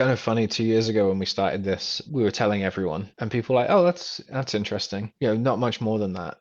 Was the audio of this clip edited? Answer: yes; 3 cuts; at 2.0 s, 3.1 s, 5.1 s

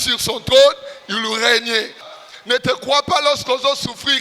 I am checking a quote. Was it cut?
yes; 1 cut; at 2.1 s

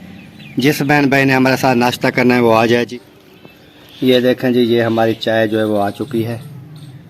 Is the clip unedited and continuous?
no; 1 cut; at 2.9 s

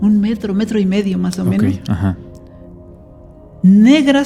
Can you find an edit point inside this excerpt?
no; 0 cuts

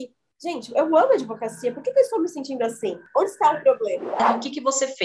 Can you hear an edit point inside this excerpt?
yes; 2 cuts; at 3.0 s, 4.2 s

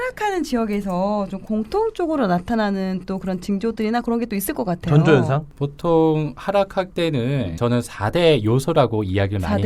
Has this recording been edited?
yes; 2 cuts; at 5.5 s, 7.2 s

